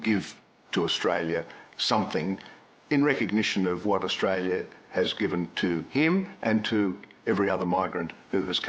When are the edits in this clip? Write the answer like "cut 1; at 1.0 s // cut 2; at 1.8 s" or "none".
none

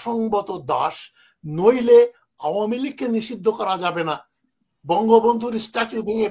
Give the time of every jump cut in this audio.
none

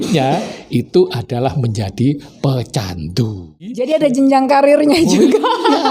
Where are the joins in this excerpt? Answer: cut 1; at 3.9 s

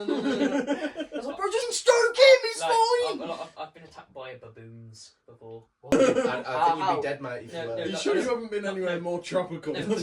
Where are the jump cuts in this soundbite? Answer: cut 1; at 1.6 s

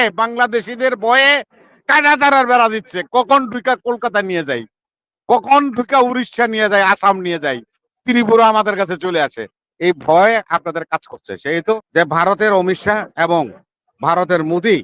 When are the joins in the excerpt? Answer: cut 1; at 11.8 s

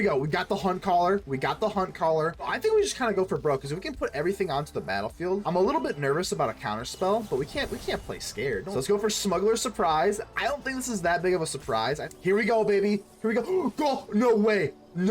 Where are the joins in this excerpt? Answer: cut 1; at 2.5 s // cut 2; at 5.4 s // cut 3; at 8.7 s // cut 4; at 12.1 s

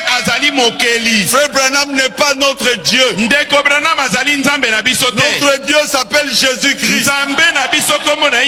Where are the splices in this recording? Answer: none

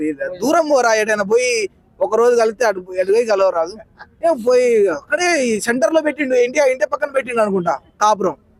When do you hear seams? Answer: none

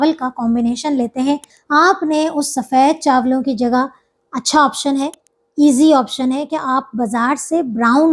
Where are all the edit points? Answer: cut 1; at 1.5 s

